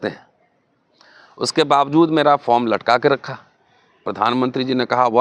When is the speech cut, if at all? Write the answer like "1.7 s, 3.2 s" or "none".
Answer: 4.0 s